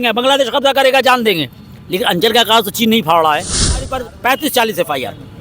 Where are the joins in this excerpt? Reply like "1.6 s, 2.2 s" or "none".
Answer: 4.0 s